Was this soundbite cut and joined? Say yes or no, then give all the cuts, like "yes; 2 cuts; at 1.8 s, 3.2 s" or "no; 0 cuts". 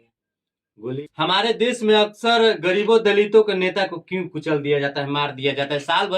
yes; 1 cut; at 1.0 s